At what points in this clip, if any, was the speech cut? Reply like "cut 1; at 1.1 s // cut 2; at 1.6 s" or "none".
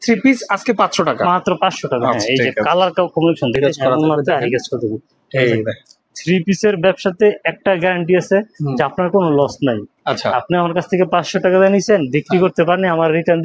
cut 1; at 3.6 s